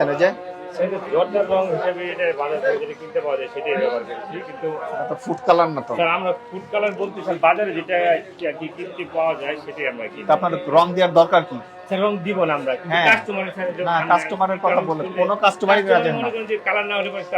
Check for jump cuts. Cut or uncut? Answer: uncut